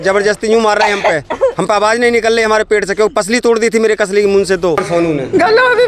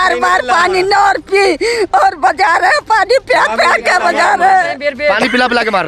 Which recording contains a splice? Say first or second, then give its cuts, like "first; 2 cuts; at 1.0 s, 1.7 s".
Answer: first; 1 cut; at 4.8 s